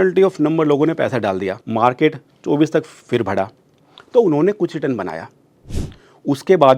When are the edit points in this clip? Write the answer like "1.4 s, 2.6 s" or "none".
1.6 s